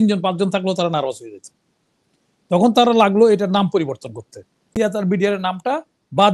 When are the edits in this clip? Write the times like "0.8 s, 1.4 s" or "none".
4.7 s